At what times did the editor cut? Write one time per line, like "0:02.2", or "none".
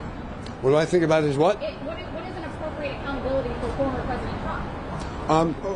0:04.7